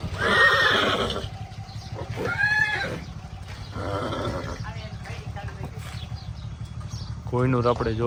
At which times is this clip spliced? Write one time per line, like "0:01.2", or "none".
none